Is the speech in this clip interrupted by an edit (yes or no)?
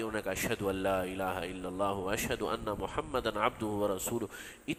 no